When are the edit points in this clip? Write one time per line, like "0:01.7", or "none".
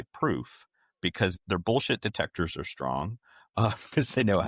0:01.4